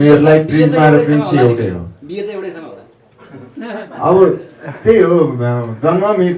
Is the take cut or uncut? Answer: uncut